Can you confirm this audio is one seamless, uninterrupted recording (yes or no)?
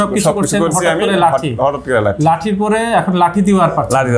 yes